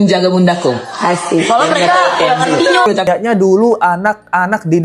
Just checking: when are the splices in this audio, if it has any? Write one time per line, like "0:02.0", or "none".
0:03.1